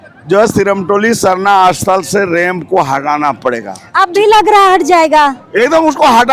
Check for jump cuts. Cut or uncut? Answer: uncut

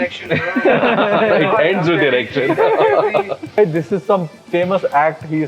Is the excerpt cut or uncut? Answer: cut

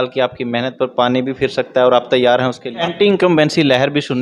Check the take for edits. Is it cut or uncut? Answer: cut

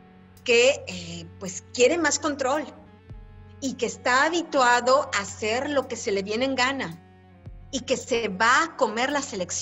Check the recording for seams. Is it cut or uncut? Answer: uncut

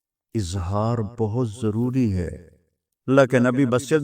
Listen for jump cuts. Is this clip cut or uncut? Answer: cut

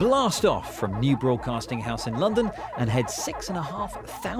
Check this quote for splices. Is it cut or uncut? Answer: cut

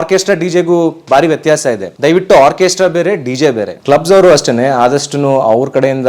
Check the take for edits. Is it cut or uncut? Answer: cut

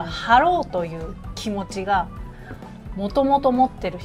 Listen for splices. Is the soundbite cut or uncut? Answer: uncut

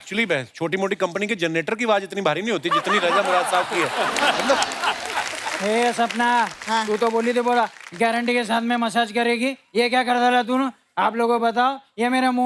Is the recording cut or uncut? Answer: cut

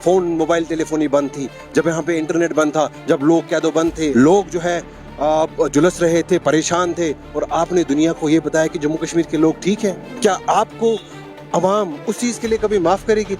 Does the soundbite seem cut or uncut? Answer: cut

